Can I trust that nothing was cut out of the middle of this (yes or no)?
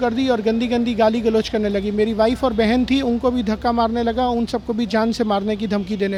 yes